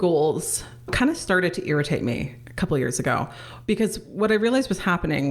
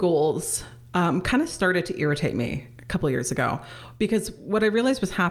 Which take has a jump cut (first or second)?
first